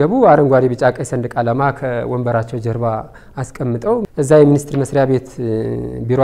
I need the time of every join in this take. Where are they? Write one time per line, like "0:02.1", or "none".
0:04.0